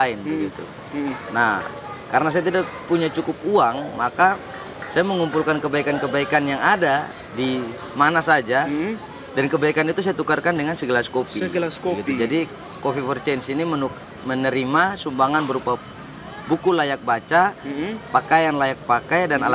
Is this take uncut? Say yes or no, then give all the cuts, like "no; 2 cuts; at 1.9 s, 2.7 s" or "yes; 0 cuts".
yes; 0 cuts